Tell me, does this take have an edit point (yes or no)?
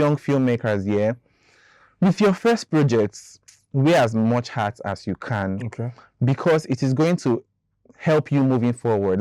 no